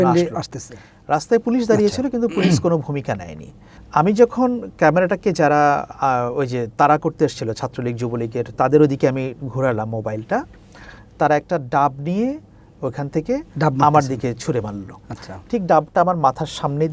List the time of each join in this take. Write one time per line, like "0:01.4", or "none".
0:03.7